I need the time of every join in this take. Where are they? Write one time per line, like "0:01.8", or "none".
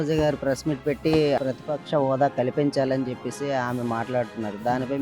0:01.4

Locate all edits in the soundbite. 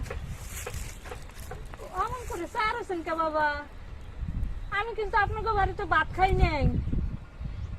none

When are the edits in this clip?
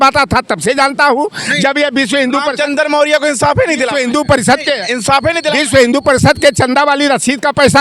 none

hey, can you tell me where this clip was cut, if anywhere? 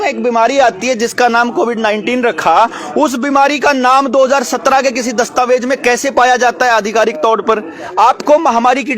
0:07.8

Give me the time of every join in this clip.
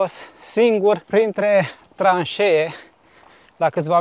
0:01.0

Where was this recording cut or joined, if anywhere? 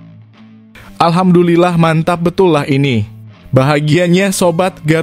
0:01.0

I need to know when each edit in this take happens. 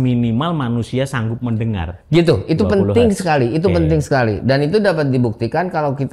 0:02.1

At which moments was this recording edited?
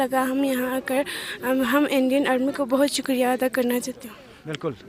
none

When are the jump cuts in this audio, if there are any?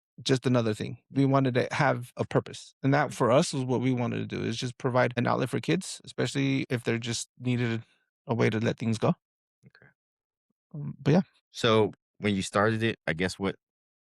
0:11.4
0:12.1

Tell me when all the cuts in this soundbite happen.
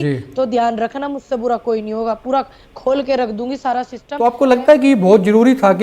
0:04.0

